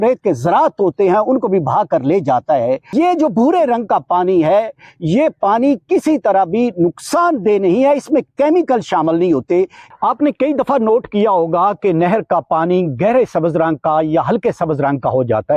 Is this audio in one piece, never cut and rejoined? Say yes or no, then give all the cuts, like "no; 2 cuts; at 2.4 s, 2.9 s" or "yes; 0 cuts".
no; 2 cuts; at 2.9 s, 9.8 s